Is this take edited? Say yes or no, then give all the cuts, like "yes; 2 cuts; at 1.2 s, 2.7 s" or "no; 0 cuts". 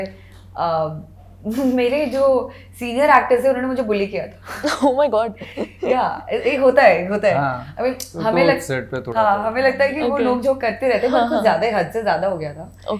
no; 0 cuts